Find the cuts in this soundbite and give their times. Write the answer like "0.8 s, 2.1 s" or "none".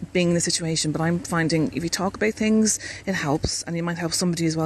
none